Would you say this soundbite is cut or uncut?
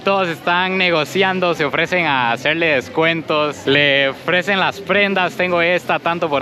uncut